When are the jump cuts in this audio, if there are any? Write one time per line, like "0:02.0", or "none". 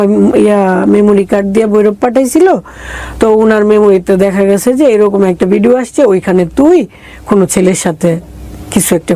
none